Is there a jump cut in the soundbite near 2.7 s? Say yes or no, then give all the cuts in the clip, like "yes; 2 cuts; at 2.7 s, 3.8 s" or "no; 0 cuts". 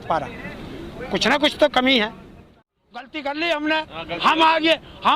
yes; 1 cut; at 2.7 s